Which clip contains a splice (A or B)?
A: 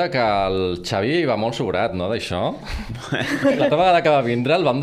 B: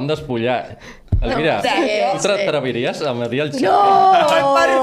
A